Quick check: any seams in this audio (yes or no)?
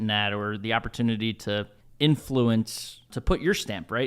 yes